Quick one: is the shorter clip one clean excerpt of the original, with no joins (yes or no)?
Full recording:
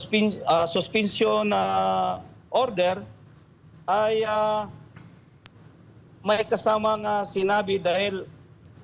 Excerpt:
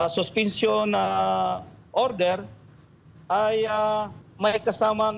no